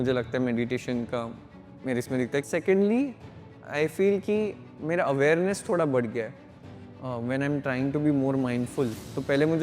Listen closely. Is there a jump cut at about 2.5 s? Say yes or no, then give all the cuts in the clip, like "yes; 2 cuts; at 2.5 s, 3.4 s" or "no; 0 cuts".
yes; 1 cut; at 2.5 s